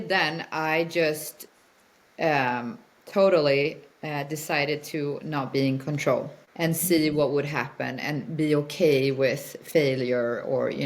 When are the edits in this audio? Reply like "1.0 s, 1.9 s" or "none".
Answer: 6.4 s